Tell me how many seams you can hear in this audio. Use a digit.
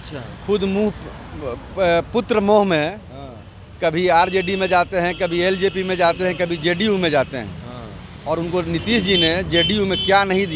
0